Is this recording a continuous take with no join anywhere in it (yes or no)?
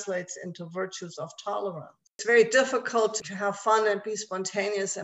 no